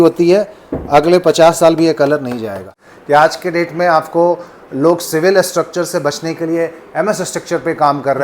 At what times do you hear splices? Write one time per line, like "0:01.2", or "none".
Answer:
0:02.7